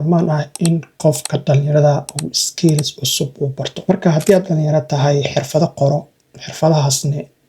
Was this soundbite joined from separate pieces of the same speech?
yes; 1 cut; at 3.7 s

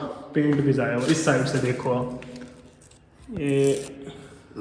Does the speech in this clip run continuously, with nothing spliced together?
yes; 0 cuts

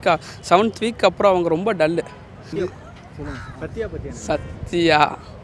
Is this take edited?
yes; 1 cut; at 2.5 s

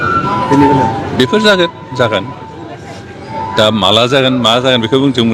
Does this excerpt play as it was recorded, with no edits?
yes; 0 cuts

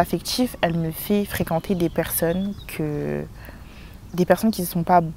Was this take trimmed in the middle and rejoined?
no; 0 cuts

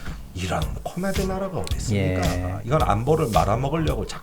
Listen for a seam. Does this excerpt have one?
yes; 1 cut; at 2.6 s

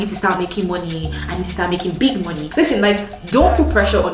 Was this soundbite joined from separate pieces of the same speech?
yes; 1 cut; at 2.5 s

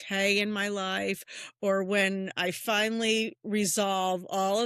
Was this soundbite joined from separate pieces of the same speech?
no; 0 cuts

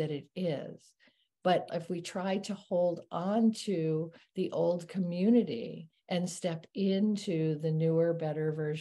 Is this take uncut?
no; 1 cut; at 1.7 s

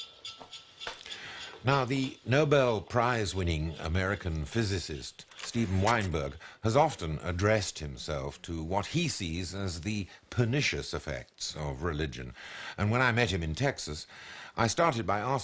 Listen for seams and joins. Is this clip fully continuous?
yes; 0 cuts

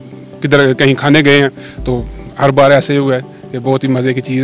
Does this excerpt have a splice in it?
no; 0 cuts

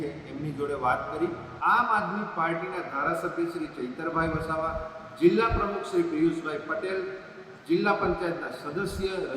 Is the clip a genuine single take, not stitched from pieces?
no; 1 cut; at 1.5 s

